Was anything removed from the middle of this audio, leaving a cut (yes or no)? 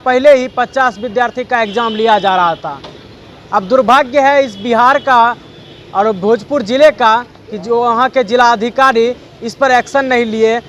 no